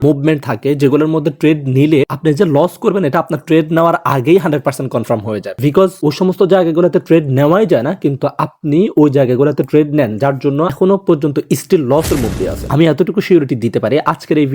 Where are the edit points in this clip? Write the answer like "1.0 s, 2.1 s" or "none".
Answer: none